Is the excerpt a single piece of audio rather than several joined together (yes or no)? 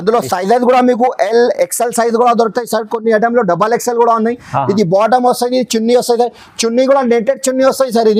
yes